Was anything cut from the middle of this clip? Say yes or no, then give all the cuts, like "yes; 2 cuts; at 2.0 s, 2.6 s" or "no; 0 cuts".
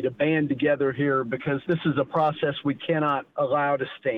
yes; 2 cuts; at 1.6 s, 3.3 s